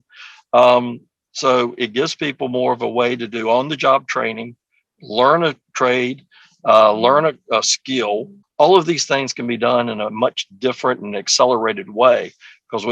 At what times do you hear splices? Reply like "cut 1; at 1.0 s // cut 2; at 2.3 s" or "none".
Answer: cut 1; at 8.4 s